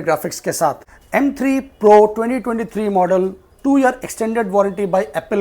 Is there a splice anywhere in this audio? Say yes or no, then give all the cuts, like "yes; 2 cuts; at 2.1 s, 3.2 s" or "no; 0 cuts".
yes; 1 cut; at 0.9 s